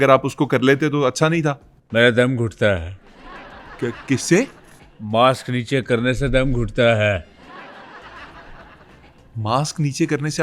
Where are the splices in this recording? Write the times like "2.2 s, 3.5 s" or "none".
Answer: none